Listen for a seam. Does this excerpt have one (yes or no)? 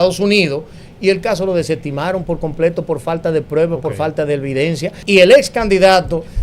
yes